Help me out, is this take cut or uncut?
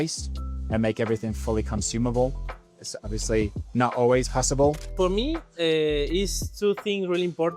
cut